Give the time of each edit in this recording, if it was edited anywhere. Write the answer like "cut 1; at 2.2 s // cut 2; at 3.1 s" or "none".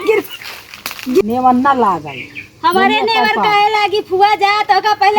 cut 1; at 1.2 s